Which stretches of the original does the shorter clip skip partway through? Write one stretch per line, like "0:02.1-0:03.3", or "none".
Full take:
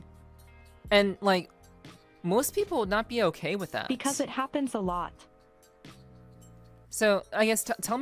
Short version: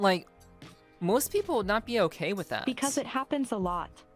none